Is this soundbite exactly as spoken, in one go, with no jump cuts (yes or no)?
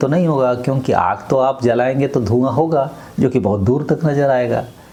yes